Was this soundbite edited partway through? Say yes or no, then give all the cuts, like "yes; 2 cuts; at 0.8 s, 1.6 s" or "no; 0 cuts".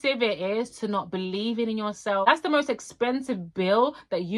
yes; 1 cut; at 2.3 s